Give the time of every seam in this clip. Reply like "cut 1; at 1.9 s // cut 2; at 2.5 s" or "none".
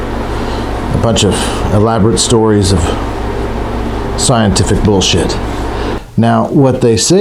cut 1; at 5.9 s